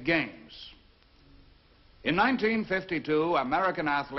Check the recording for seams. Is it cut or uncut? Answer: uncut